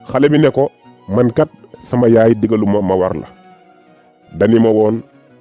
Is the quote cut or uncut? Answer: uncut